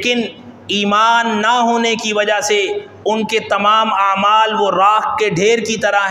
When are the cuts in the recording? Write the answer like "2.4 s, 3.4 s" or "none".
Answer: none